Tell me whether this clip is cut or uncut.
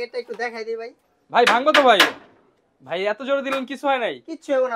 uncut